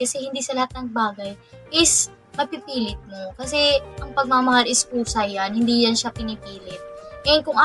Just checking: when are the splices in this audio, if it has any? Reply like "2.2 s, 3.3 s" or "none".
none